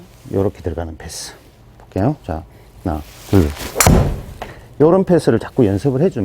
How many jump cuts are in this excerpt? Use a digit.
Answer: 0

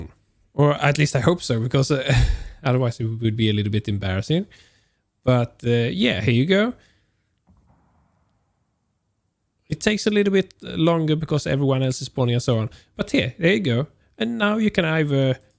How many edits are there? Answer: 0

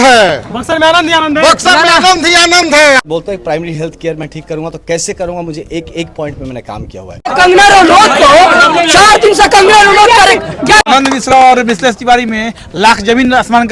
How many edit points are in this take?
3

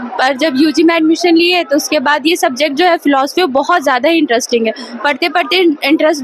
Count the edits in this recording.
0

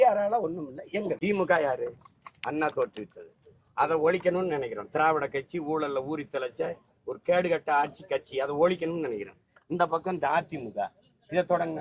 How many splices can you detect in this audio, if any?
1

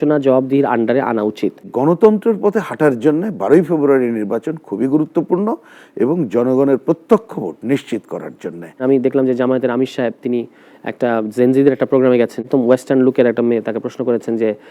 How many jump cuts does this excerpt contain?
3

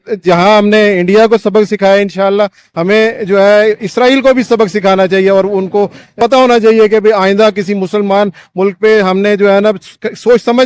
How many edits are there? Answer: 1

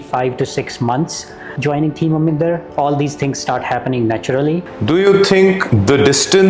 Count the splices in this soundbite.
3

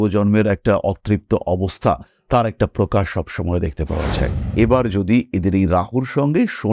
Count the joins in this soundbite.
1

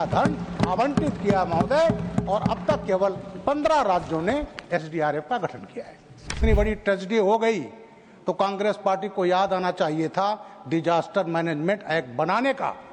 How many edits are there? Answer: 1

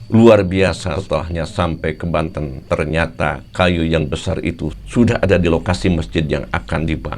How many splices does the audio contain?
1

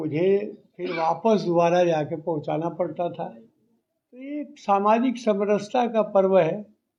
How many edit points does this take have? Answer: 0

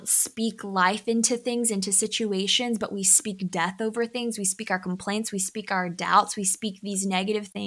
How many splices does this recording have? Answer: 0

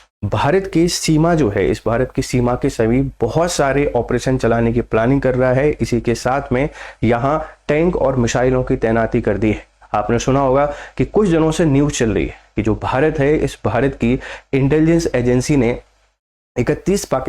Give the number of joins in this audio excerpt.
0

